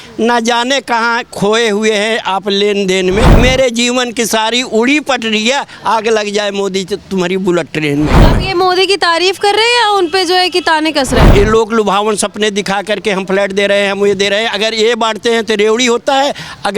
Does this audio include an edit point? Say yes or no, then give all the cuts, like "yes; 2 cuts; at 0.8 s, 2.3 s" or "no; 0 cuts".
yes; 3 cuts; at 3.3 s, 8.3 s, 11.3 s